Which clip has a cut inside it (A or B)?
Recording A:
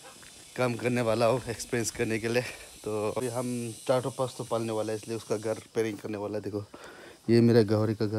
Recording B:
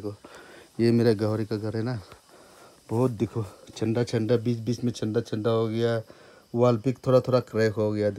A